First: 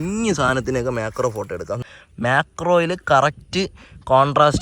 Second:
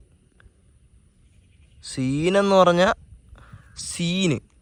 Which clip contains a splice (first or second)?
first